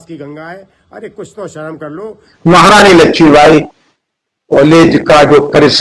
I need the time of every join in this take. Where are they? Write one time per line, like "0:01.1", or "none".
0:02.3